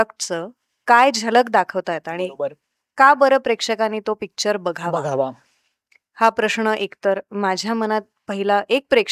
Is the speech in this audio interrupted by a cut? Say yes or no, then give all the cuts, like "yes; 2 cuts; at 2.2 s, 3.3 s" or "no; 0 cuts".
no; 0 cuts